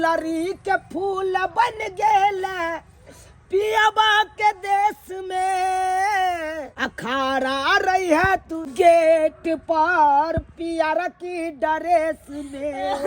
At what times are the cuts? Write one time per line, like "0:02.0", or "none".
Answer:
0:06.7
0:08.6